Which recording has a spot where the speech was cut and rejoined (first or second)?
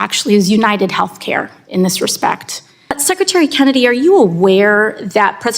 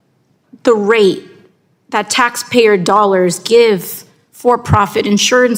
first